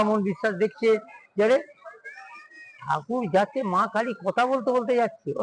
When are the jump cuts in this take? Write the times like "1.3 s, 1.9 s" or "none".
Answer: none